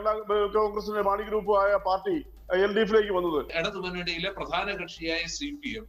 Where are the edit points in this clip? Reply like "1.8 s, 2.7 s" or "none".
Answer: 3.6 s